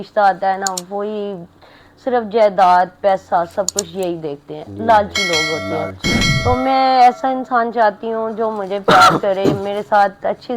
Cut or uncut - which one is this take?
uncut